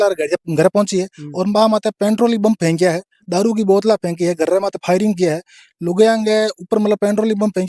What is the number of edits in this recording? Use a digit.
0